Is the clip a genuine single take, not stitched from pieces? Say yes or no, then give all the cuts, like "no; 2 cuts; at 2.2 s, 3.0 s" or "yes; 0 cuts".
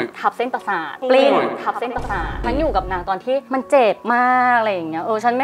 no; 1 cut; at 2.4 s